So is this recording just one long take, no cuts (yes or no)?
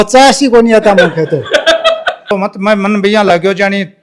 no